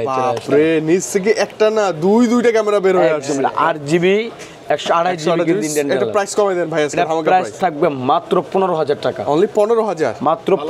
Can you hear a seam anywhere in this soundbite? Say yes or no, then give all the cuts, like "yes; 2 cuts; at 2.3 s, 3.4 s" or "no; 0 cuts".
no; 0 cuts